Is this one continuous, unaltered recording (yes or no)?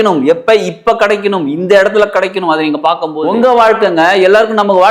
no